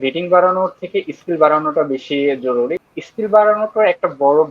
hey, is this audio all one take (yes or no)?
no